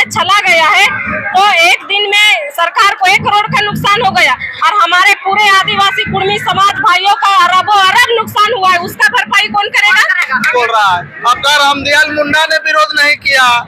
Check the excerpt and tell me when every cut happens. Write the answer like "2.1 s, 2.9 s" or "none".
10.5 s